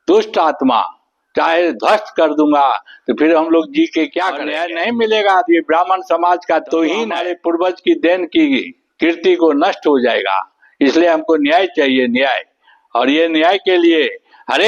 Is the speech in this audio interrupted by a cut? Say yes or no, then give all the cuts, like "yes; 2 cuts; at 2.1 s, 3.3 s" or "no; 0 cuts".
yes; 2 cuts; at 4.5 s, 7.3 s